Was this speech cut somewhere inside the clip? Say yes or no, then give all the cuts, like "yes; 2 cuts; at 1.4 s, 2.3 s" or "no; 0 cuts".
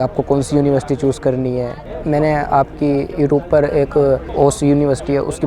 yes; 2 cuts; at 1.8 s, 4.3 s